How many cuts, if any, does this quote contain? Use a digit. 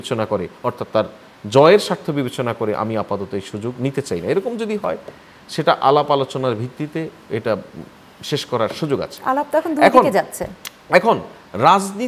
0